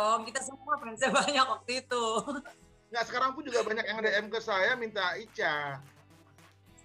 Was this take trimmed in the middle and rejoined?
no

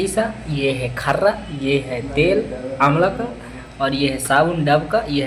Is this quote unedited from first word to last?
yes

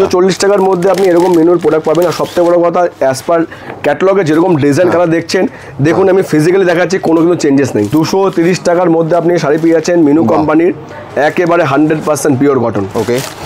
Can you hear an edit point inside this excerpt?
yes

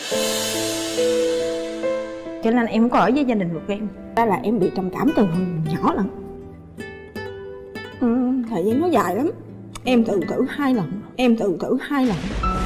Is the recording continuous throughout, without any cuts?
no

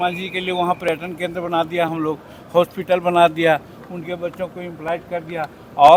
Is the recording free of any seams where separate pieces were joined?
yes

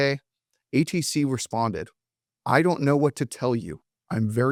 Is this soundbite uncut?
yes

